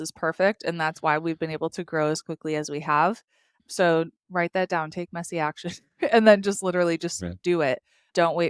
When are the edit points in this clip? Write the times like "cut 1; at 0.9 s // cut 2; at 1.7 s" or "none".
none